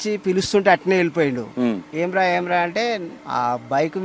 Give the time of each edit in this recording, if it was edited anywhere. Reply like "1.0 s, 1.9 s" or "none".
3.1 s